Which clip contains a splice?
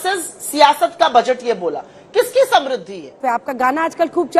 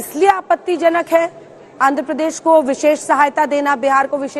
first; 1 cut; at 3.2 s

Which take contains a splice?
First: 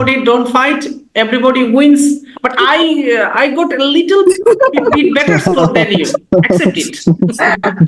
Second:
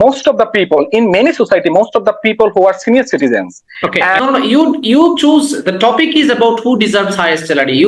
second; 1 cut; at 4.2 s

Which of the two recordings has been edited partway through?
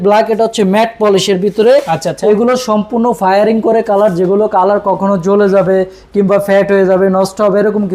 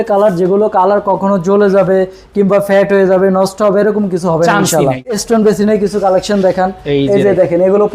second; 1 cut; at 5.2 s

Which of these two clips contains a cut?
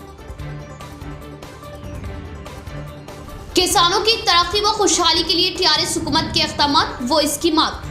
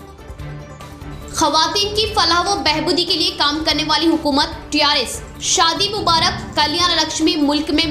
second; 1 cut; at 1.0 s

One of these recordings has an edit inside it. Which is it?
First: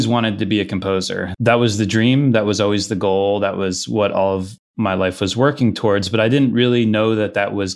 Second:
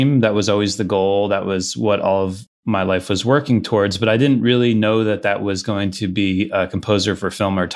first; 1 cut; at 1.2 s

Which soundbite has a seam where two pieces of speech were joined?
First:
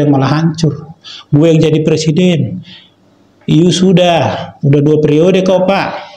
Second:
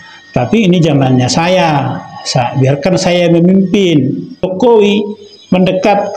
second; 1 cut; at 4.5 s

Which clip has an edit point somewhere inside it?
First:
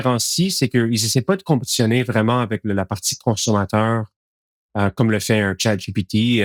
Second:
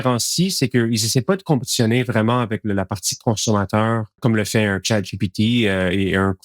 second; 1 cut; at 4.2 s

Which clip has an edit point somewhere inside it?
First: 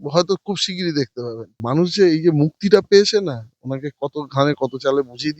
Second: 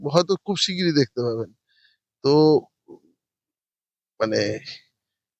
first; 1 cut; at 1.5 s

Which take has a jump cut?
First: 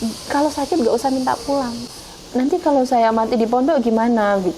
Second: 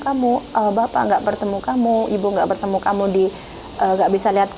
first; 1 cut; at 1.8 s

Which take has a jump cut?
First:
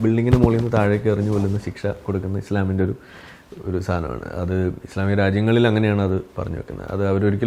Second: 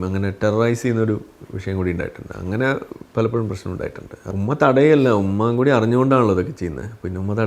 second; 1 cut; at 4.2 s

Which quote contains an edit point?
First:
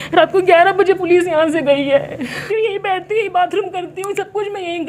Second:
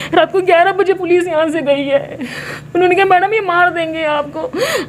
first; 1 cut; at 2.4 s

